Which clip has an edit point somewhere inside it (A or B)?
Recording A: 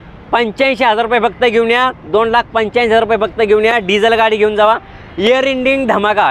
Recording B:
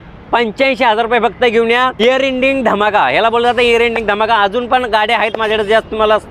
B